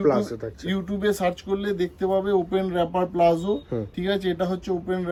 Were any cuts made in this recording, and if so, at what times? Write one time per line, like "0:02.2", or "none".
none